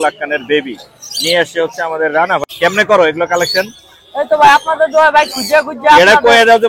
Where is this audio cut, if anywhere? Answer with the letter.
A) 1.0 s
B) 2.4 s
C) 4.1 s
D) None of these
B